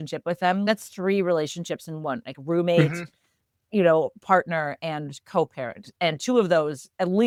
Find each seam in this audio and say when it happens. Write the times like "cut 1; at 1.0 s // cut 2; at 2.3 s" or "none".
none